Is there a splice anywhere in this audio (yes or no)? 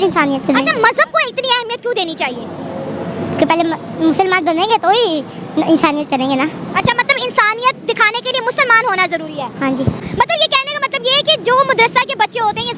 no